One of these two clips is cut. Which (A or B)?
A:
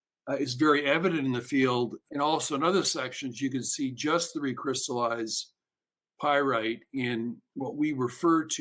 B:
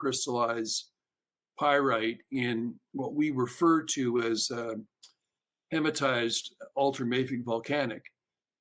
A